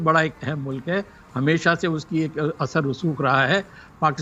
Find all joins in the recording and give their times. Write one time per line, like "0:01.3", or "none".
none